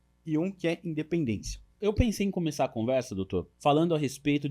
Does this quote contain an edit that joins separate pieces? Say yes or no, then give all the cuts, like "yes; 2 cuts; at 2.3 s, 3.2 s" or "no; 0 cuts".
yes; 2 cuts; at 1.7 s, 3.5 s